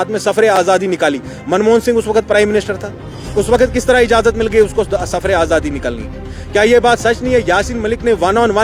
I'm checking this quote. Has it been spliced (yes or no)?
no